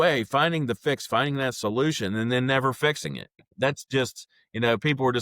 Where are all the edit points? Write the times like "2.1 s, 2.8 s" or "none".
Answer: 3.4 s